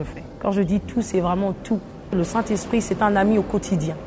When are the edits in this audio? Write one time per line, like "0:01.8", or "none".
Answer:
0:02.2